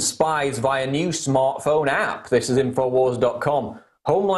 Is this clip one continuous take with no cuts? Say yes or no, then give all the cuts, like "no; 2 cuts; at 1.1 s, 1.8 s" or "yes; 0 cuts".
no; 1 cut; at 0.9 s